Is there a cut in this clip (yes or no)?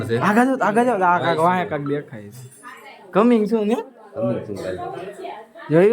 yes